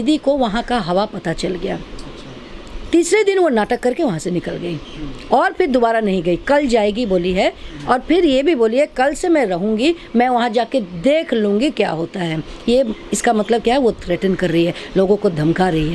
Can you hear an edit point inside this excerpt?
no; 0 cuts

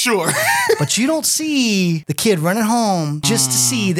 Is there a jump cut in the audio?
yes; 2 cuts; at 2.1 s, 3.2 s

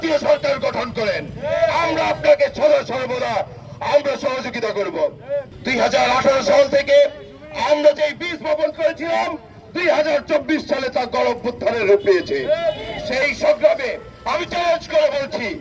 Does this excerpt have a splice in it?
no; 0 cuts

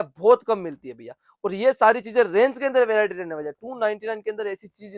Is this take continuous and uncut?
yes; 0 cuts

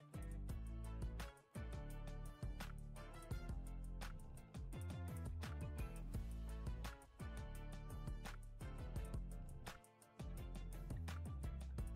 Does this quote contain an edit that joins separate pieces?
no; 0 cuts

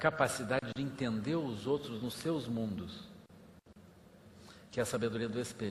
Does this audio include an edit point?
no; 0 cuts

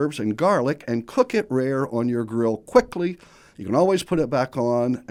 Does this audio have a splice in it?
no; 0 cuts

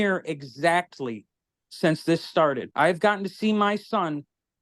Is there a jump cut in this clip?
yes; 1 cut; at 2.7 s

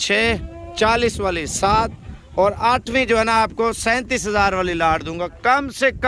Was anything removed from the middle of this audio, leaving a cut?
no; 0 cuts

